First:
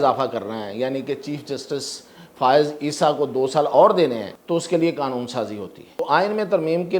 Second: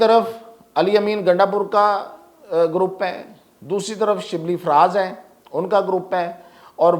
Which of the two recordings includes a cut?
first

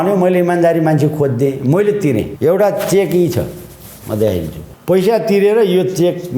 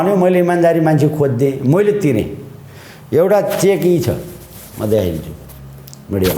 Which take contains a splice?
first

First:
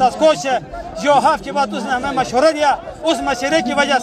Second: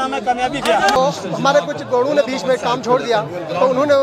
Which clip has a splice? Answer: second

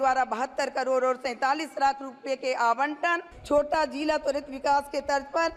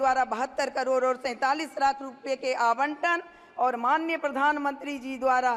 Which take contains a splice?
first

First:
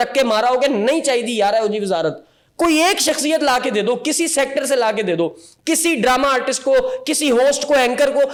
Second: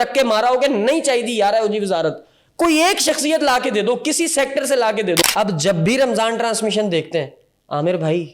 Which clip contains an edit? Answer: second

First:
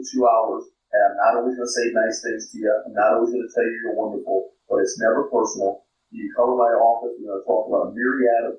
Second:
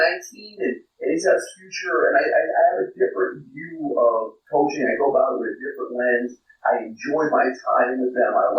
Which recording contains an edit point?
second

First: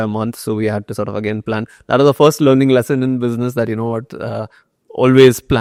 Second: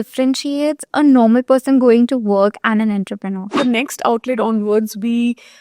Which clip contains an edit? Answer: second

